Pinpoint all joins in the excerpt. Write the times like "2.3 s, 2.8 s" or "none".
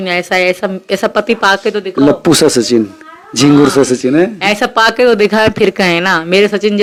none

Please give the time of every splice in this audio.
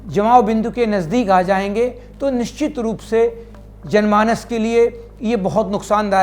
3.7 s

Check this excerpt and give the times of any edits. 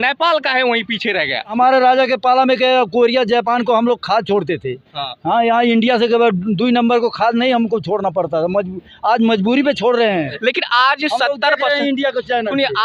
1.5 s, 10.3 s

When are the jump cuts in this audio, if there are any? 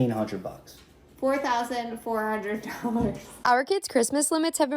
3.3 s

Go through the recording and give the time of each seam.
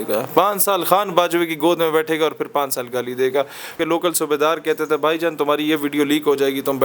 3.8 s

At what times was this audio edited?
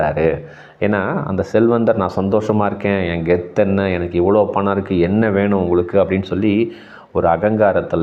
none

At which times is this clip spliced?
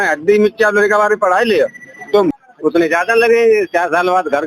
2.5 s

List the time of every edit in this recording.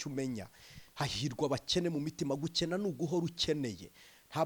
none

